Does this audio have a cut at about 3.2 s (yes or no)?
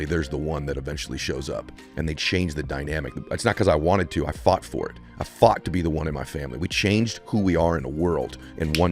yes